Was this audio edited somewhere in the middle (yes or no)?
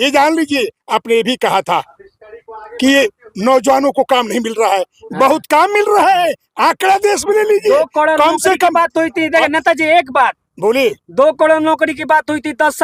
no